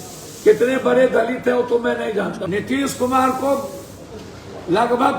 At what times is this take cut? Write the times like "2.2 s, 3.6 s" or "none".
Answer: 2.4 s